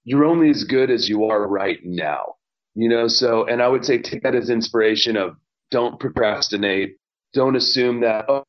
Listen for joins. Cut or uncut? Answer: uncut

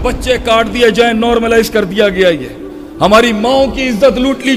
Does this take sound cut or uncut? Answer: uncut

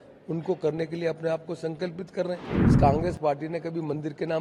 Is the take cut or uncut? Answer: cut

